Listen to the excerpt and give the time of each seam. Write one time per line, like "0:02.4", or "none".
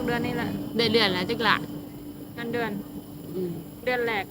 none